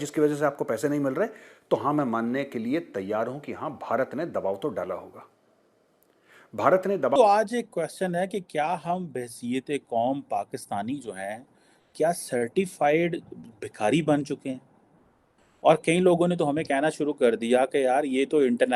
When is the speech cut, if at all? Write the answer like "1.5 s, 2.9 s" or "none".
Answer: 7.2 s